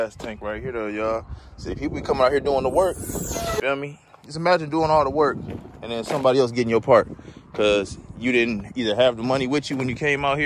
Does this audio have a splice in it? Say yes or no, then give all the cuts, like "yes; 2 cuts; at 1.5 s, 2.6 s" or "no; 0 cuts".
yes; 1 cut; at 3.6 s